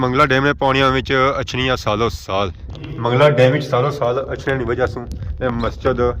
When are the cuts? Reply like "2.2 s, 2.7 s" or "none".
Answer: 2.8 s